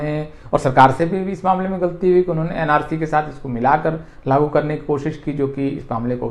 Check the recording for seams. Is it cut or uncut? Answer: uncut